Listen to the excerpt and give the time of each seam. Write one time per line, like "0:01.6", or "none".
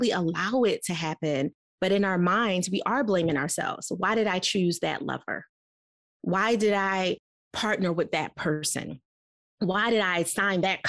none